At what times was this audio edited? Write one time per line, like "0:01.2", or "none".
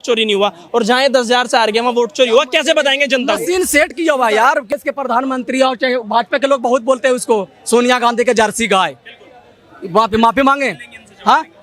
0:04.8